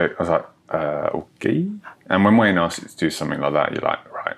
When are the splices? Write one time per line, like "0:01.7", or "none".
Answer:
none